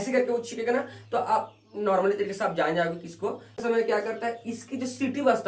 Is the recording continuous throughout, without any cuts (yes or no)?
no